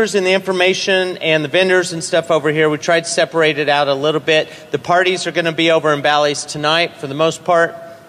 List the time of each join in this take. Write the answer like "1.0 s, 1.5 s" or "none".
6.7 s